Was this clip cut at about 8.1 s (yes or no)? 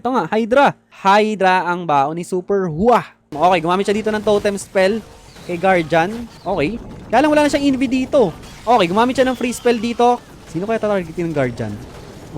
no